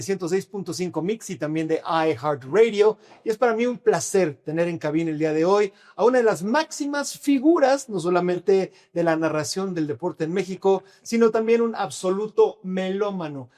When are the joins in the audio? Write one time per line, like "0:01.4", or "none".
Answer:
none